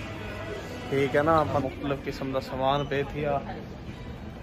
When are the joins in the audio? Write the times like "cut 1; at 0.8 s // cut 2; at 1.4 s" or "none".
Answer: cut 1; at 1.6 s